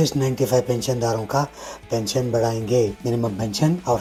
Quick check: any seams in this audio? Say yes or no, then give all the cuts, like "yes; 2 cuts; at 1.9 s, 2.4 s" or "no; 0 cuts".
no; 0 cuts